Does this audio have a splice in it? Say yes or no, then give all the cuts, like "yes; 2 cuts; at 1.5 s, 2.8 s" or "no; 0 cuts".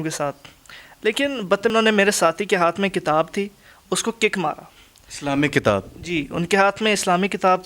yes; 1 cut; at 1.7 s